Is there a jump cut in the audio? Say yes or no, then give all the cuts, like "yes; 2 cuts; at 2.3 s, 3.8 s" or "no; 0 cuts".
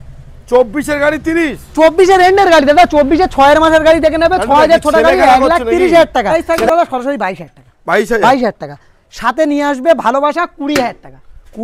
yes; 1 cut; at 6.3 s